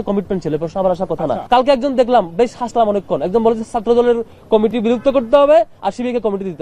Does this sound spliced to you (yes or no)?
yes